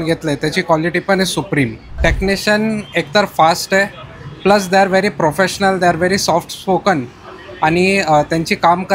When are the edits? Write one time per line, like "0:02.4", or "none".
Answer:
0:01.9